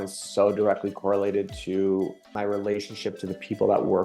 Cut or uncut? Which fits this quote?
cut